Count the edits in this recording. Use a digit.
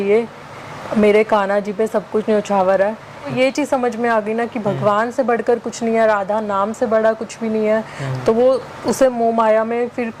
1